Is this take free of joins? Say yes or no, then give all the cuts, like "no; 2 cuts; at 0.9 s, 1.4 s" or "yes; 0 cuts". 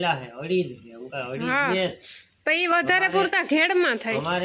yes; 0 cuts